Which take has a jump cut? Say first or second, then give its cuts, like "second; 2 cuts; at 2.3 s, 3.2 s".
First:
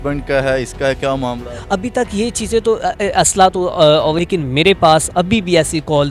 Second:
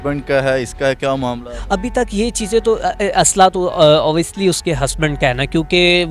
first; 1 cut; at 4.2 s